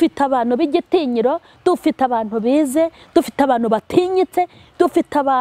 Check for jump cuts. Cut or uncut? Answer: uncut